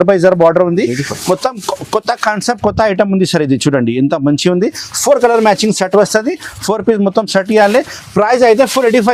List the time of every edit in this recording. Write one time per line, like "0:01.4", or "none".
none